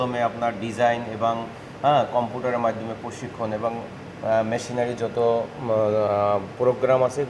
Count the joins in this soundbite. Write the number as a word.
zero